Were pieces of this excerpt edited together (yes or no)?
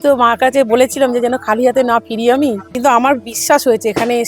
yes